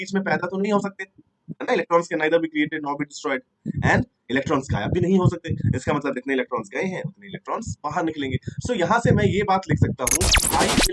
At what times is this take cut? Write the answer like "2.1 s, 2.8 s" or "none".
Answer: none